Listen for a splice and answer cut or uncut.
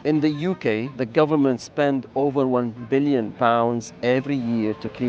cut